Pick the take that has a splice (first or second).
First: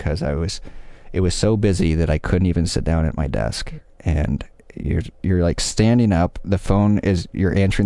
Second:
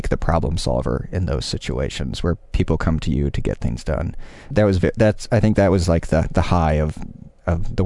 second